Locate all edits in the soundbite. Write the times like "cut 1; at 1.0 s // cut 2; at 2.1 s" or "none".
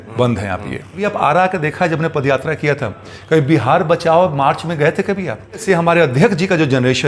cut 1; at 1.0 s // cut 2; at 5.6 s